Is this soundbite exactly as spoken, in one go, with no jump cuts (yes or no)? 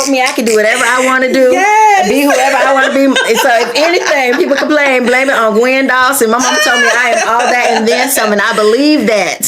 yes